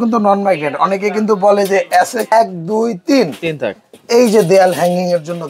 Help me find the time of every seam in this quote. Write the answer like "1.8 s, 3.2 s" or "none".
2.3 s